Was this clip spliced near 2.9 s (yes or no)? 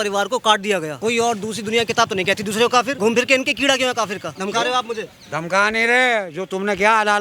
yes